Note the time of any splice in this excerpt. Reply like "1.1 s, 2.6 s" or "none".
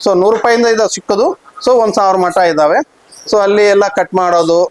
none